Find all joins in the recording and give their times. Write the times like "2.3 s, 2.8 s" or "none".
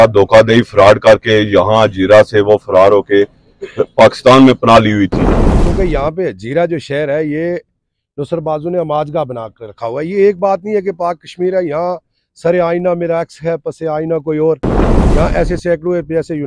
5.7 s